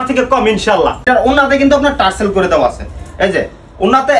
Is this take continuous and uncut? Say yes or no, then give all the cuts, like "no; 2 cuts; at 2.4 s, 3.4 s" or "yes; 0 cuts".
no; 1 cut; at 1.1 s